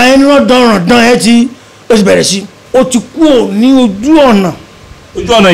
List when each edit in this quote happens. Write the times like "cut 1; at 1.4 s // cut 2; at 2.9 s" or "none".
cut 1; at 2.6 s

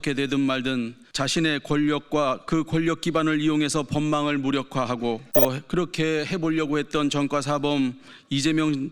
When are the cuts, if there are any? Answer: cut 1; at 1.0 s // cut 2; at 2.4 s // cut 3; at 5.3 s

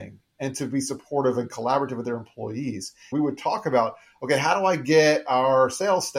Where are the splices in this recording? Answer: cut 1; at 3.1 s

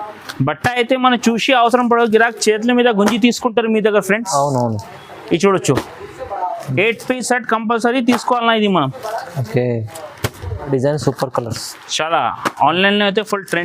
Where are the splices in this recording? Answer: cut 1; at 10.7 s

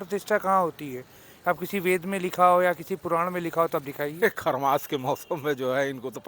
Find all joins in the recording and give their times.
cut 1; at 4.1 s

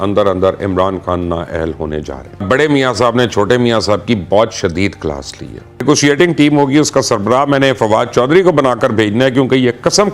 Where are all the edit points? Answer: cut 1; at 2.4 s // cut 2; at 5.8 s

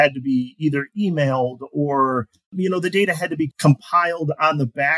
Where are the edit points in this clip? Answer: cut 1; at 2.5 s // cut 2; at 3.5 s

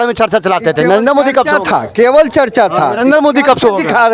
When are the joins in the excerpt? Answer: none

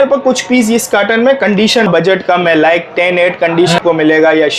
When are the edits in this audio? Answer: cut 1; at 1.9 s // cut 2; at 3.8 s

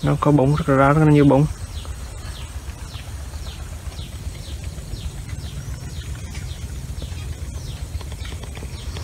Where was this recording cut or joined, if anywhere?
none

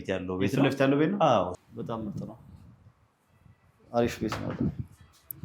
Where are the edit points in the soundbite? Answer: cut 1; at 1.6 s

